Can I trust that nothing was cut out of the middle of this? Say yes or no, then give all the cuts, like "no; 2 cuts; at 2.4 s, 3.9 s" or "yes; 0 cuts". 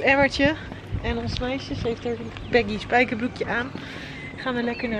yes; 0 cuts